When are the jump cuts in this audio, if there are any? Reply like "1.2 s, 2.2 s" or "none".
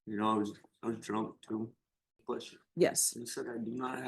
2.2 s